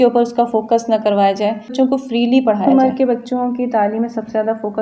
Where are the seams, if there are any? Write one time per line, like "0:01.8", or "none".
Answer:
0:01.7
0:02.7